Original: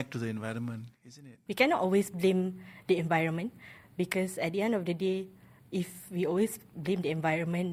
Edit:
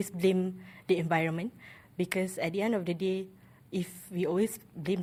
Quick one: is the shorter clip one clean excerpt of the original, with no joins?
yes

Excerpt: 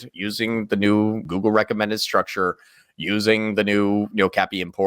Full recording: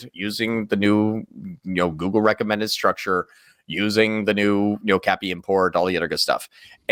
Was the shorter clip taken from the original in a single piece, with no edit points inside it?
no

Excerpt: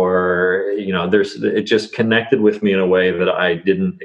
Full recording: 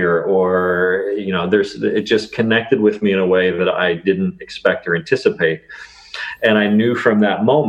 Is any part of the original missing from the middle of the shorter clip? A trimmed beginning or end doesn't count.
no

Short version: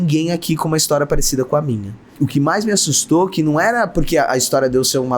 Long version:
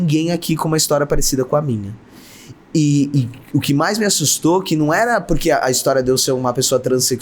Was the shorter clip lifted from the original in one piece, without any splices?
no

